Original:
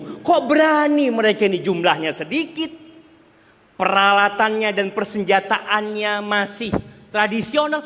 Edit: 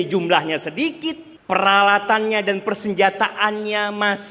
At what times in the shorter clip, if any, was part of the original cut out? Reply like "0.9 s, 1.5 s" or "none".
1.3 s